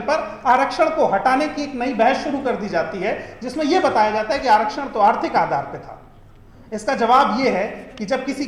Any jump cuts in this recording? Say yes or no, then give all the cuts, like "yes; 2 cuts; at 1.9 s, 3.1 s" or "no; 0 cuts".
no; 0 cuts